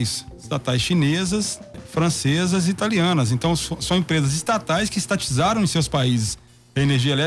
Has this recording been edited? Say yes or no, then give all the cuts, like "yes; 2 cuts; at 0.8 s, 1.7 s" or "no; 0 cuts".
yes; 1 cut; at 1.8 s